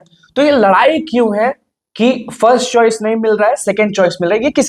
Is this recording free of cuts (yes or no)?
yes